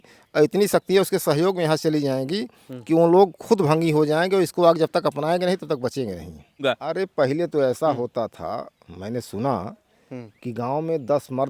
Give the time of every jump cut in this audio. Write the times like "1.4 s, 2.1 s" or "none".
6.6 s